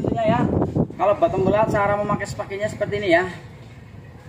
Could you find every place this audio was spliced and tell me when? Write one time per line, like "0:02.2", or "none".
0:00.9